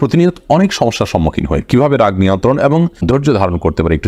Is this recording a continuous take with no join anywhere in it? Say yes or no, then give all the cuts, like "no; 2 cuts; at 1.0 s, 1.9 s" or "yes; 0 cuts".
yes; 0 cuts